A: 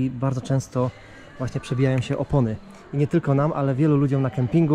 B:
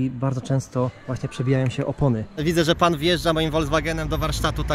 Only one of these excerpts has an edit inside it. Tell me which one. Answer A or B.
B